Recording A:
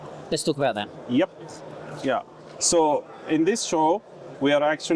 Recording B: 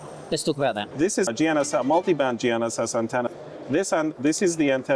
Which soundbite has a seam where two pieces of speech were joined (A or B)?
B